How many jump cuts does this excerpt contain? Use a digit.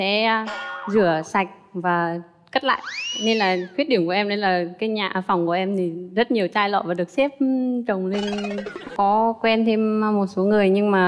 1